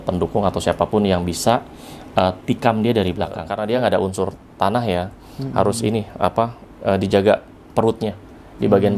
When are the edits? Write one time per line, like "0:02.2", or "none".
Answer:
0:03.5